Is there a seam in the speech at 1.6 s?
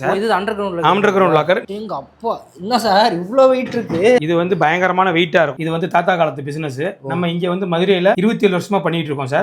yes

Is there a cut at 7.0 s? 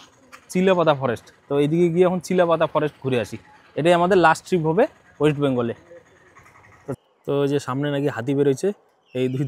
yes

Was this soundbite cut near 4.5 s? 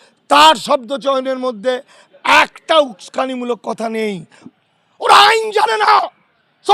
yes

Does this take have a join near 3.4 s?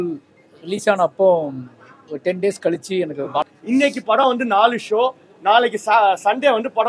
yes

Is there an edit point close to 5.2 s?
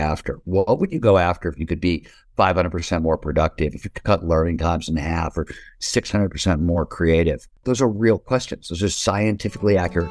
no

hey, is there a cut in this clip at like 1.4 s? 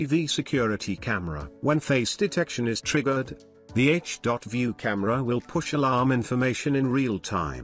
yes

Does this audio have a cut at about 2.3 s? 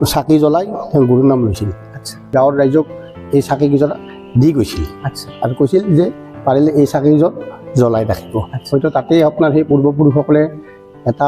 yes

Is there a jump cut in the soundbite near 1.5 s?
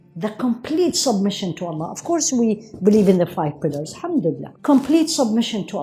no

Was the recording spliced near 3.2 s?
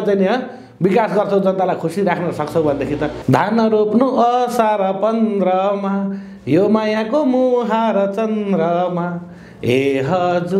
yes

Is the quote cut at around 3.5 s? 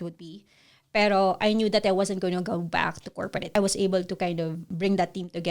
yes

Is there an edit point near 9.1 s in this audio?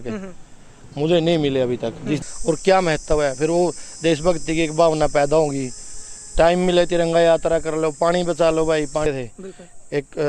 yes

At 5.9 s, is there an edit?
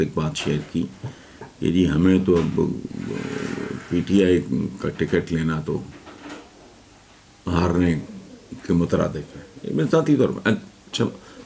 no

